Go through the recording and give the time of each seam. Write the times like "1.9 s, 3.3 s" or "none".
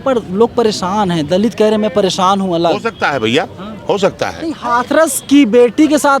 4.4 s